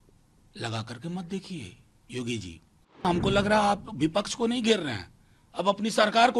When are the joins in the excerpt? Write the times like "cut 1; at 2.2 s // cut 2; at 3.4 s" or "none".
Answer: cut 1; at 3.0 s